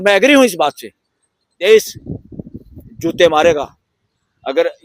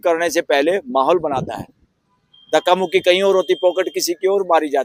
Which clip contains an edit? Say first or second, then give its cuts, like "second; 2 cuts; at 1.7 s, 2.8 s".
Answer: first; 1 cut; at 1.6 s